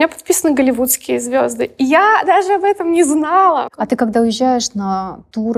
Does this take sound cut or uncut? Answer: cut